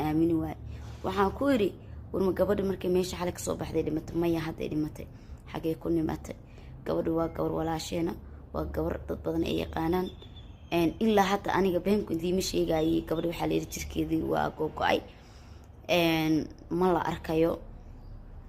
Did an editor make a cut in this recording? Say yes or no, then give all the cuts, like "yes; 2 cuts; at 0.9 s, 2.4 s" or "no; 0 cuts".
no; 0 cuts